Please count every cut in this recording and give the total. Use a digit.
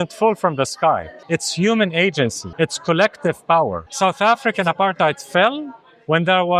3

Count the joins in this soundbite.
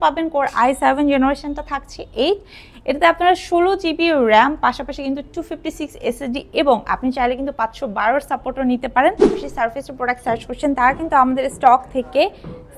1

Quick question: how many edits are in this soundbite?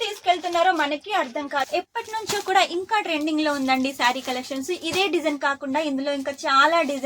1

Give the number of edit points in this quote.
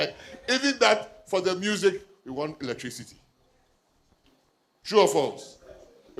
0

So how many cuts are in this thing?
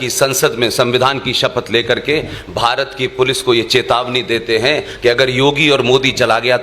0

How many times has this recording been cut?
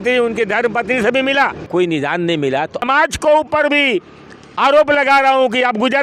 2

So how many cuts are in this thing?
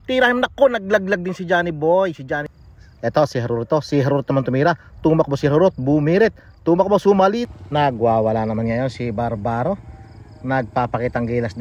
2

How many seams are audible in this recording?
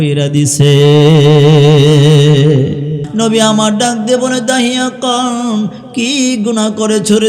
1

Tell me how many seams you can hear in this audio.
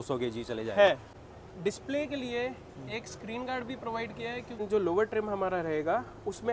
2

